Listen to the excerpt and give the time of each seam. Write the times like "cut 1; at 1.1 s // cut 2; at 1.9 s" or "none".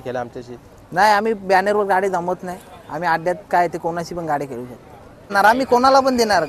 cut 1; at 5.3 s